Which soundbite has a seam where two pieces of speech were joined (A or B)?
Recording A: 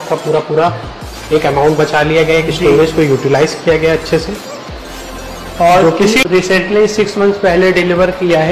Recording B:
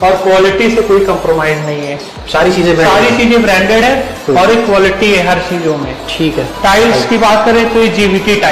A